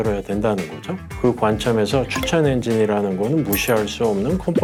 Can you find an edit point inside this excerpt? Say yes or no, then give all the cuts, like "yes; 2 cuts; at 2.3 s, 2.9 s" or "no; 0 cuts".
no; 0 cuts